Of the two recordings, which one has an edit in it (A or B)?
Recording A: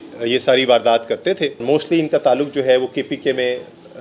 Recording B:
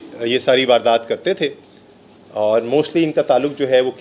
A